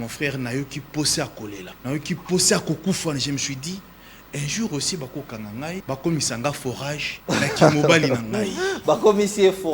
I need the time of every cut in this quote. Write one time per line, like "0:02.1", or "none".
0:01.7
0:05.8
0:07.1